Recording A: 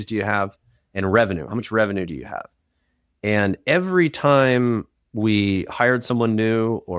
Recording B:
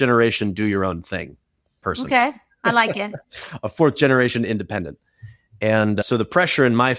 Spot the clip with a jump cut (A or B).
B